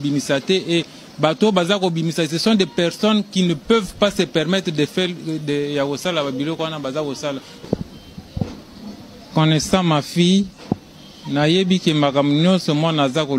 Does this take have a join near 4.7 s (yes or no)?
no